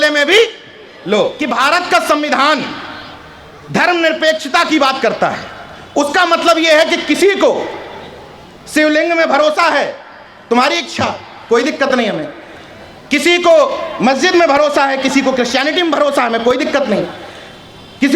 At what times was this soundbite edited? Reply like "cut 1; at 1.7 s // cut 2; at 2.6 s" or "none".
cut 1; at 1.4 s